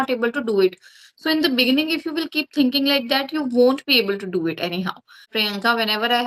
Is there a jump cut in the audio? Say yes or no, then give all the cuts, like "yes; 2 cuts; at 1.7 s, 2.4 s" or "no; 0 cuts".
yes; 1 cut; at 5.3 s